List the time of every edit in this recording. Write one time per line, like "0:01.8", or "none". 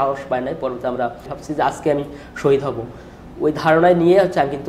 0:01.4

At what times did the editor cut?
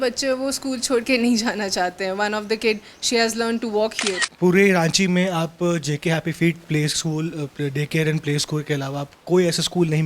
0:04.3

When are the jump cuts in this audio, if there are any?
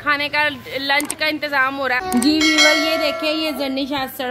0:02.0

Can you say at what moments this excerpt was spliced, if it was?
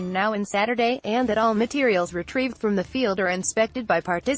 0:01.0

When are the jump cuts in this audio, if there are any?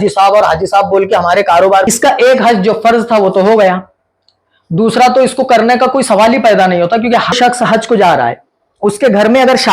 0:01.9
0:07.3

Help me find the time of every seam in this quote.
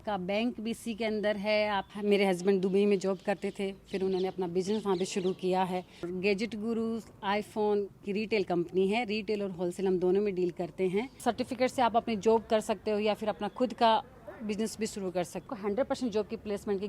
0:01.9
0:06.0
0:11.1
0:15.5

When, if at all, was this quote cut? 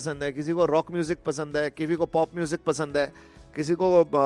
none

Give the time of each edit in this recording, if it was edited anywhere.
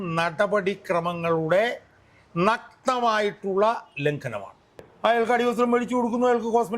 0:04.9

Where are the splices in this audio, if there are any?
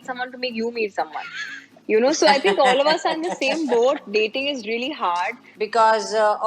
0:05.4

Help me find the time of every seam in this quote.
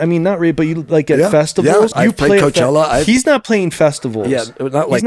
0:01.9

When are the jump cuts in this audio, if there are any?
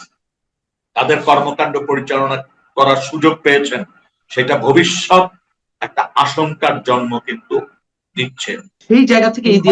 0:08.7

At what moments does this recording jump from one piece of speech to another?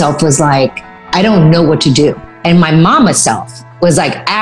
0:01.0

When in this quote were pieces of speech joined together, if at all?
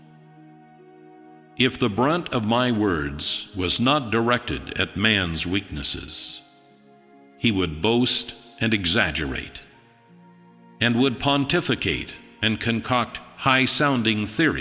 none

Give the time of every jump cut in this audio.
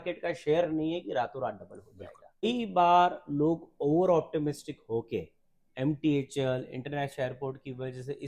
0:02.5

